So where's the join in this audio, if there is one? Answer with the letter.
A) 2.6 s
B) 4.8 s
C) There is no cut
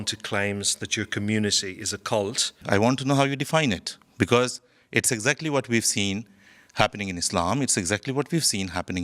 A